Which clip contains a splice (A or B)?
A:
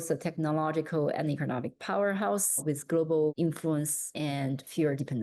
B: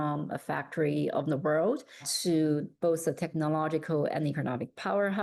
A